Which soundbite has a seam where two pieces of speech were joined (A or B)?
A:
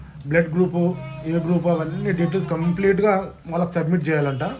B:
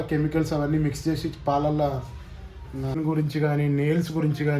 B